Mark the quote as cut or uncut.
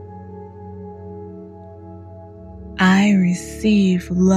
cut